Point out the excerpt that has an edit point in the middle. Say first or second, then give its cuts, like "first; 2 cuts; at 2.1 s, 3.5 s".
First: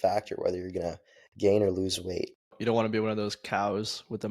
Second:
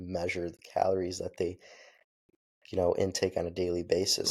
first; 1 cut; at 2.6 s